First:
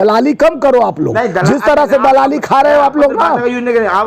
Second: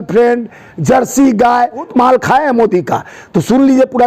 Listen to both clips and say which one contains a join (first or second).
second